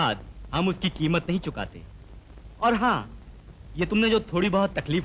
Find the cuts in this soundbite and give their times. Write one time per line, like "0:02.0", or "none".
none